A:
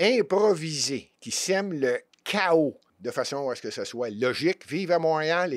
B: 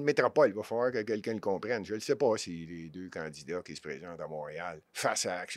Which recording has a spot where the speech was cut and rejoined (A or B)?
A